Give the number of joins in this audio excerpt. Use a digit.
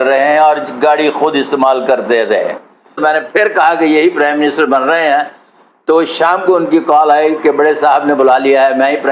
1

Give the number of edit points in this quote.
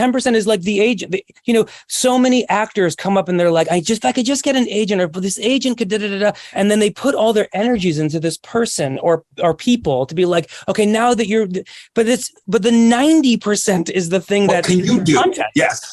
1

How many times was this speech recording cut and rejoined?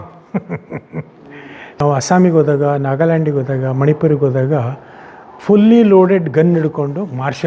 1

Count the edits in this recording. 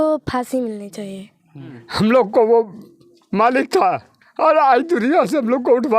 1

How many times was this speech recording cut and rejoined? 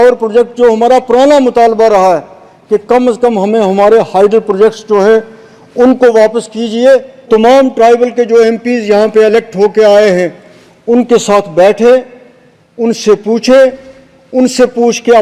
1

